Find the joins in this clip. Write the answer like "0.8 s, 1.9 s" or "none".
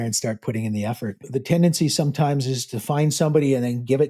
1.2 s